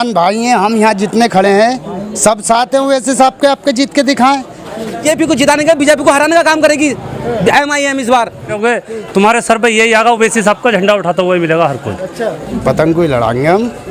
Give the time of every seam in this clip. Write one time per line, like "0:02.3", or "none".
0:05.0
0:08.6
0:12.5